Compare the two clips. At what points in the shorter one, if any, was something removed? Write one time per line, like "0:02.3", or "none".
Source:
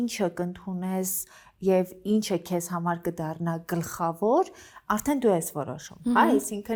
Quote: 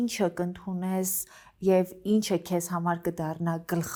none